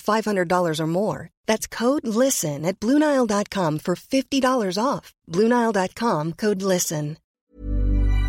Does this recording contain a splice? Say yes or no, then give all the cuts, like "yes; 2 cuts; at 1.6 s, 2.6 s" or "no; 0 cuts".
yes; 1 cut; at 7.2 s